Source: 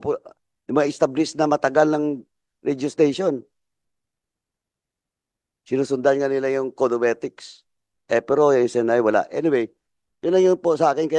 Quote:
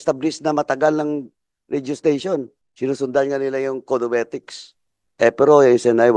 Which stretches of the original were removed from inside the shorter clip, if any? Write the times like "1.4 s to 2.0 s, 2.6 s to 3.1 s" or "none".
3.6 s to 5.5 s

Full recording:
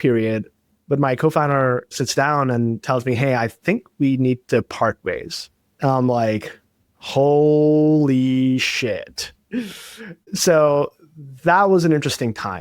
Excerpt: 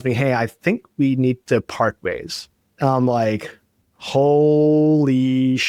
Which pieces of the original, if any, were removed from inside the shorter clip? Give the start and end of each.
none

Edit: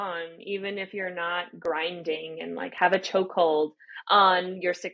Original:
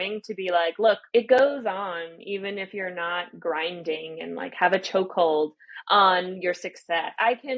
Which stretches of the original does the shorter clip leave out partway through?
none

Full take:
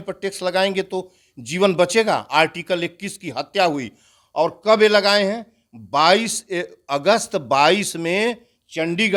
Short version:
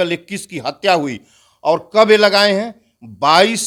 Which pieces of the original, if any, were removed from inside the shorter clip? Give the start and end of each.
none

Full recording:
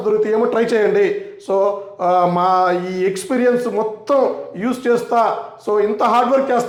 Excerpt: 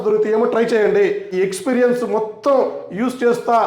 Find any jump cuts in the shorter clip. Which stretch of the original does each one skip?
1.3 s to 2.9 s

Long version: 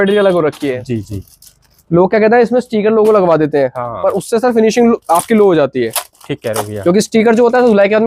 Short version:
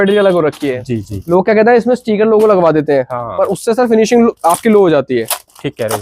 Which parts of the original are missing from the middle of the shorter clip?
1.1 s to 1.8 s

